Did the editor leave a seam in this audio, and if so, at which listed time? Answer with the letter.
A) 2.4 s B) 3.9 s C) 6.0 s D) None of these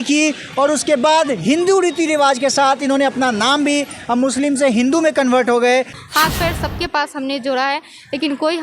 C